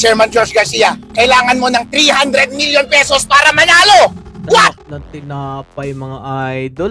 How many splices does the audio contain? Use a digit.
0